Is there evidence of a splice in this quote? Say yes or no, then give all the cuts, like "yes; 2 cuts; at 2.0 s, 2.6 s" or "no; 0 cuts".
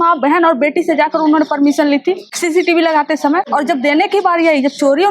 yes; 2 cuts; at 2.3 s, 3.5 s